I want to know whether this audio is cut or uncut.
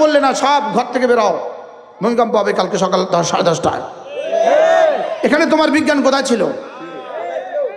uncut